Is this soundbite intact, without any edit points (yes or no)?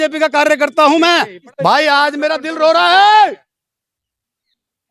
no